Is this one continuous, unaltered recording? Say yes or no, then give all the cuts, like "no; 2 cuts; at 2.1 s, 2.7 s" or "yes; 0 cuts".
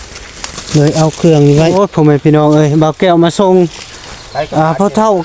no; 1 cut; at 1.7 s